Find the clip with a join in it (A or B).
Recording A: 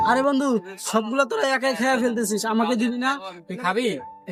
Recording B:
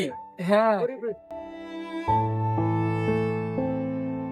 B